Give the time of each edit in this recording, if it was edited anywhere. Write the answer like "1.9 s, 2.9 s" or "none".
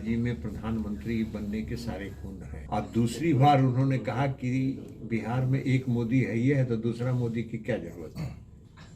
2.5 s